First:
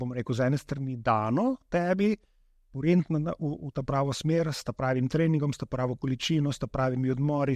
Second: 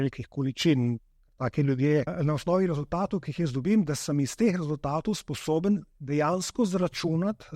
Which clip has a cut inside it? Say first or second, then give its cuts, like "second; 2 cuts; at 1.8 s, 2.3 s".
second; 1 cut; at 2.1 s